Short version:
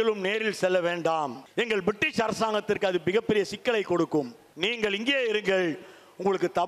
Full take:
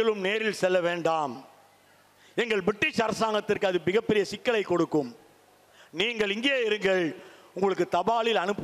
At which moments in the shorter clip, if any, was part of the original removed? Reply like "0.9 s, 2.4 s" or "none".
1.4 s, 4.4 s